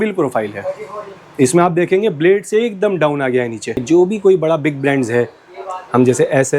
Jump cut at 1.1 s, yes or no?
no